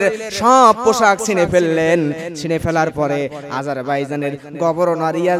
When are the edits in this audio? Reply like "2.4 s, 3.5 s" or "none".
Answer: none